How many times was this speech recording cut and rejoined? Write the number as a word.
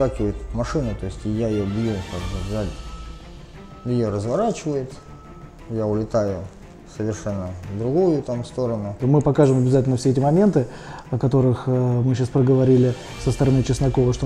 one